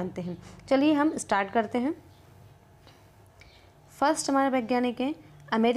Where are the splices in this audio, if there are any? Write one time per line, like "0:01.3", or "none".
0:03.2